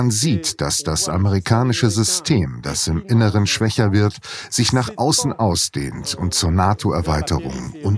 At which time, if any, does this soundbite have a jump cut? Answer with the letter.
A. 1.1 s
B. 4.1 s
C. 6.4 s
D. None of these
D